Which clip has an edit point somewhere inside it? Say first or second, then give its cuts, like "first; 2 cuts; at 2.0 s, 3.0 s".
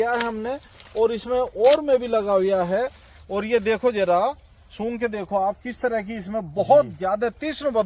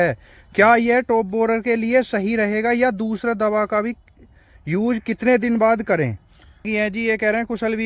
second; 1 cut; at 6.7 s